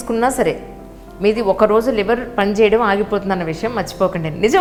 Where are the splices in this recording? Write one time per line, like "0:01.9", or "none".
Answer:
none